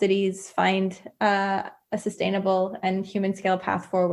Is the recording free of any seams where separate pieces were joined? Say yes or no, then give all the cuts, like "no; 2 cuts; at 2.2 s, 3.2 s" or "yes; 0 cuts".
yes; 0 cuts